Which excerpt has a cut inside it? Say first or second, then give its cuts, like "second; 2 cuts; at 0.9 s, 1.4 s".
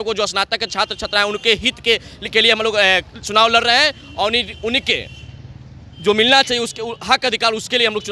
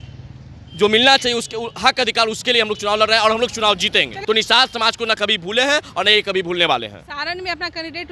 second; 1 cut; at 4.2 s